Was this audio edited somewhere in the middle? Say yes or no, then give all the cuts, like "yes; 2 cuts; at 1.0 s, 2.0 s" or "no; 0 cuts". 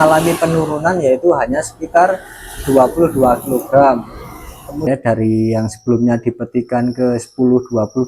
yes; 1 cut; at 4.8 s